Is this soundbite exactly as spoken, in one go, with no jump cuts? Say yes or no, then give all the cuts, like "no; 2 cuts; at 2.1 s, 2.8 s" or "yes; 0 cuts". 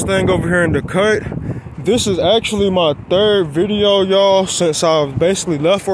yes; 0 cuts